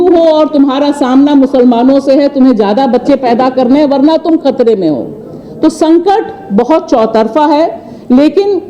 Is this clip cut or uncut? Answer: uncut